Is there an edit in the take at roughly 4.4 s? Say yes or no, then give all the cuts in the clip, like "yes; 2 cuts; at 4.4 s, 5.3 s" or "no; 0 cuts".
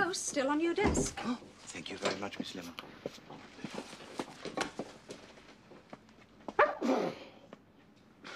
yes; 1 cut; at 4.4 s